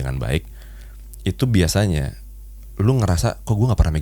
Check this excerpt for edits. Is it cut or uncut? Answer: uncut